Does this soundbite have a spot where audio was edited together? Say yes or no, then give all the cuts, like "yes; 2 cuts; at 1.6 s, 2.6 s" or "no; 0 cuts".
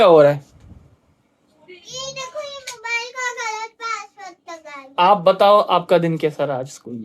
no; 0 cuts